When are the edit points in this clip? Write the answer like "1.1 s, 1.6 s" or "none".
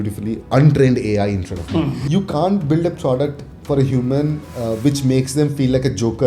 2.0 s